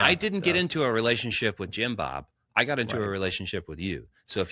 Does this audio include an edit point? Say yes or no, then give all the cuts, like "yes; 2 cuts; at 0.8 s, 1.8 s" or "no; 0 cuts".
no; 0 cuts